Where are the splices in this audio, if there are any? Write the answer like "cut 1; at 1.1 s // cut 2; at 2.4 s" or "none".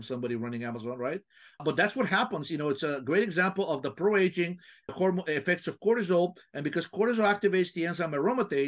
cut 1; at 1.6 s // cut 2; at 4.9 s